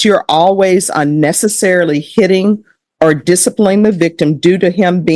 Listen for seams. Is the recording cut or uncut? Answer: uncut